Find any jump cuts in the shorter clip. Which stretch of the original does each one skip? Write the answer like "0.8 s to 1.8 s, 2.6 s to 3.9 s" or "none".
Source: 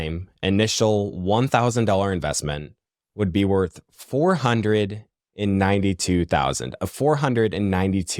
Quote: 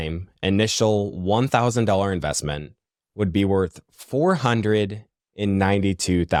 none